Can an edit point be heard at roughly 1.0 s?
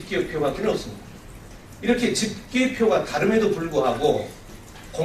yes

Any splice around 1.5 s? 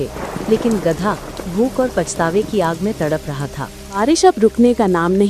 no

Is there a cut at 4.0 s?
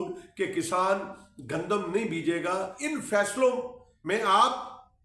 no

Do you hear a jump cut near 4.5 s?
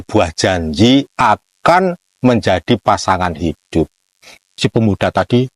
yes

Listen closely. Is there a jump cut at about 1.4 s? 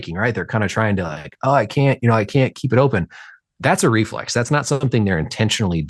no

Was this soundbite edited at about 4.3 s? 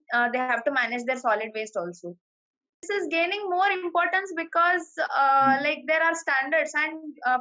no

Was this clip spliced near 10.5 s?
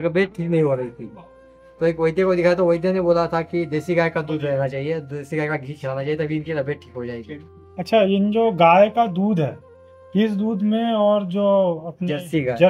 no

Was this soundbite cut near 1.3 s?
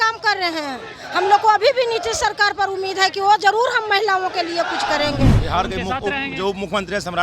no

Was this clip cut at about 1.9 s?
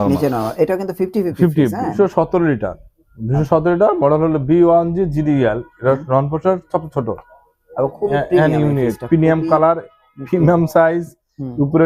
yes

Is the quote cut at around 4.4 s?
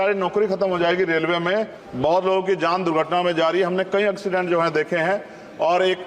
no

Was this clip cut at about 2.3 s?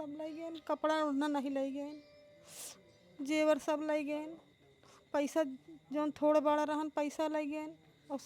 no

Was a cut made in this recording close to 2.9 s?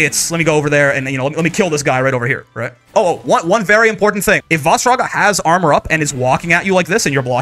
yes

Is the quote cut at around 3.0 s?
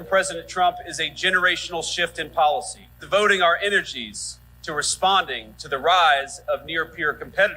yes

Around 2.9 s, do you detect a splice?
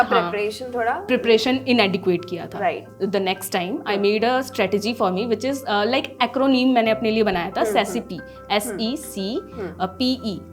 yes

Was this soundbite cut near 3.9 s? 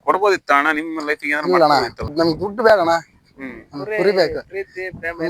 no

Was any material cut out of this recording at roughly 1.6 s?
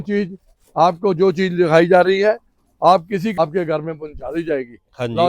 no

